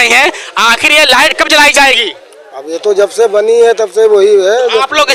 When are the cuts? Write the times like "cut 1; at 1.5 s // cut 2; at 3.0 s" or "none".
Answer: none

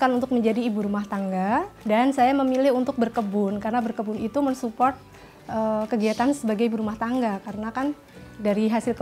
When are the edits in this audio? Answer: cut 1; at 1.7 s

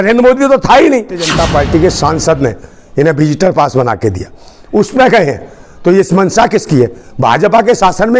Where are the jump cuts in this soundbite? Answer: cut 1; at 1.3 s

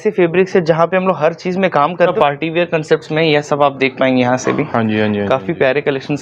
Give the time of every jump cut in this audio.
cut 1; at 2.1 s

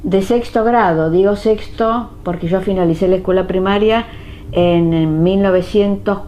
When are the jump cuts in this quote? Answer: cut 1; at 1.5 s

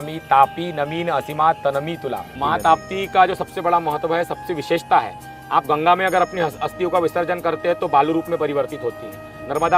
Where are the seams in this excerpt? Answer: cut 1; at 2.4 s

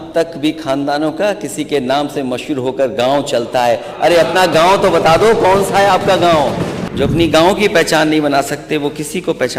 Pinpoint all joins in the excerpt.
cut 1; at 6.8 s

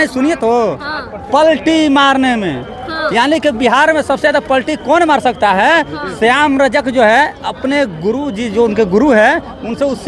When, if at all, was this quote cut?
none

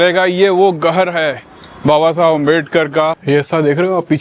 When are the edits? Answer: cut 1; at 3.2 s

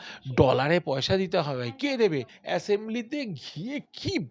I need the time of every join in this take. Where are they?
cut 1; at 2.3 s

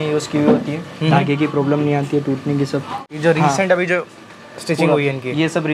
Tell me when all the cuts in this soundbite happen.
cut 1; at 3.1 s

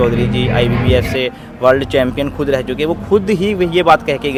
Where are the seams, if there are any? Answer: none

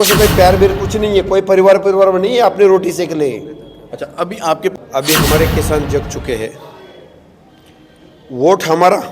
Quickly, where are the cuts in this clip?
cut 1; at 4.7 s

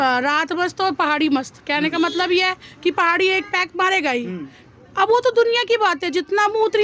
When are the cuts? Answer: none

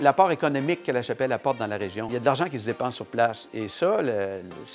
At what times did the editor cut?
cut 1; at 2.1 s

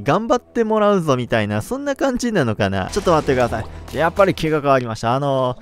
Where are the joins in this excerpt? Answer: cut 1; at 2.9 s

